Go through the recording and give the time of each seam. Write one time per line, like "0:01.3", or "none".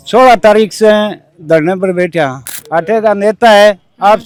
none